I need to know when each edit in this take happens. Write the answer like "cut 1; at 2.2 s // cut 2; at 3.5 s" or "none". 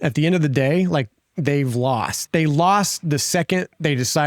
cut 1; at 2.2 s